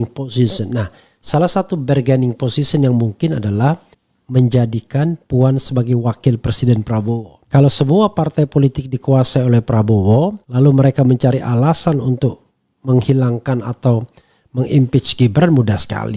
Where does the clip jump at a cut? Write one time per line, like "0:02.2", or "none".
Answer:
0:07.4